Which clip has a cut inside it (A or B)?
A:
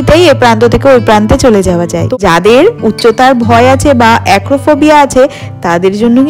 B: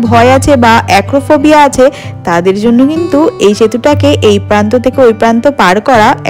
A